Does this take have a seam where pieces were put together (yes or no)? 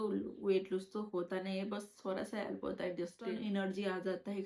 yes